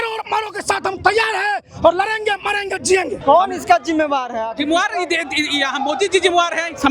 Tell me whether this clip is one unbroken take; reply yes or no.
no